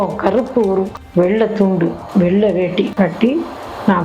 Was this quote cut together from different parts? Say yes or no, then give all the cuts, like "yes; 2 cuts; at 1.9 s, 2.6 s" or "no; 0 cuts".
yes; 1 cut; at 0.9 s